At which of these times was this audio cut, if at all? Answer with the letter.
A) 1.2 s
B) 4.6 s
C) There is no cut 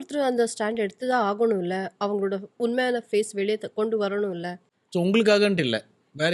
C